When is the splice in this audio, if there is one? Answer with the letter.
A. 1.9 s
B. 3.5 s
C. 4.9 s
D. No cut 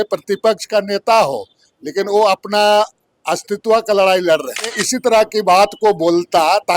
C